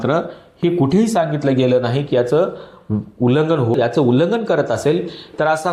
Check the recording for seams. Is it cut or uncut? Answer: cut